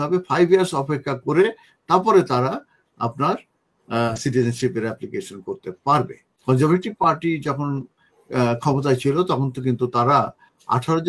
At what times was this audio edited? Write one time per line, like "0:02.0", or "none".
0:06.3